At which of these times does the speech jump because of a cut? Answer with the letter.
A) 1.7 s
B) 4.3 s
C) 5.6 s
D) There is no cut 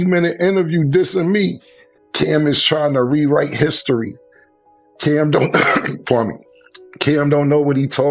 D